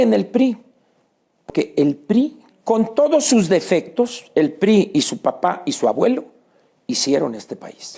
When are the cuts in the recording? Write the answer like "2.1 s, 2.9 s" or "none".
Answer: 1.5 s